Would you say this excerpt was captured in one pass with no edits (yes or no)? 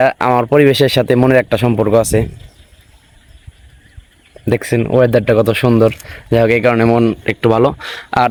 yes